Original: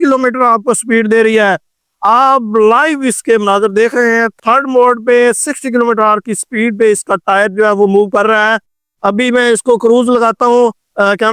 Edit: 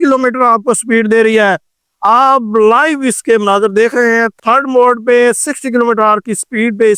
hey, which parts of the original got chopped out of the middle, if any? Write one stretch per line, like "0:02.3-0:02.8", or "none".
none